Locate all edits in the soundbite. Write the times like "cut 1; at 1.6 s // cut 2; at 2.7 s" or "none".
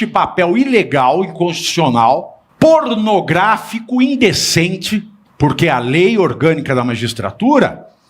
cut 1; at 2.4 s // cut 2; at 5.2 s